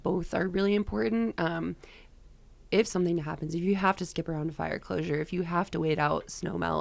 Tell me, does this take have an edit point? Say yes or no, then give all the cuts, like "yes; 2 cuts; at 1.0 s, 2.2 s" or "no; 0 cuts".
no; 0 cuts